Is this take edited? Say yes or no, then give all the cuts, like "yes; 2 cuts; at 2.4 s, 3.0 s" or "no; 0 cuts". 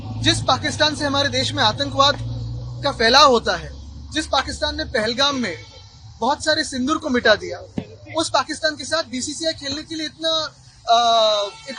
no; 0 cuts